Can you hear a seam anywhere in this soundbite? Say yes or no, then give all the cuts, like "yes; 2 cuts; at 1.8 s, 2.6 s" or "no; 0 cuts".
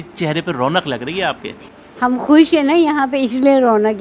yes; 1 cut; at 1.5 s